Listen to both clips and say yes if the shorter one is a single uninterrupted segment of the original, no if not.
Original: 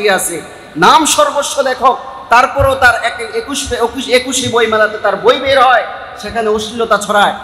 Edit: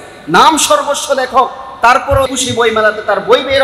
no